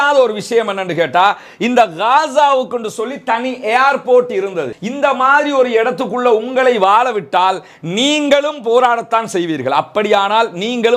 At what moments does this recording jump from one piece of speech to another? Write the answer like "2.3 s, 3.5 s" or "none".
4.8 s